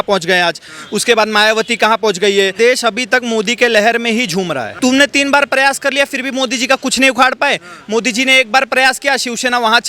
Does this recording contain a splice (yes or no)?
yes